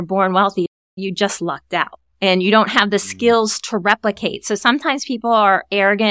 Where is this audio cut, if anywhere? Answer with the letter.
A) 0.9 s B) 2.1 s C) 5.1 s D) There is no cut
A